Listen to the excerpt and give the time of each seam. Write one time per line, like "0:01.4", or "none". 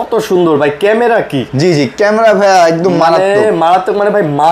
none